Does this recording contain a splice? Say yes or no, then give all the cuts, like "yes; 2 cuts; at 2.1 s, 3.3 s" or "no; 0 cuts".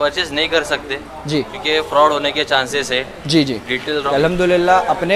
yes; 1 cut; at 4.0 s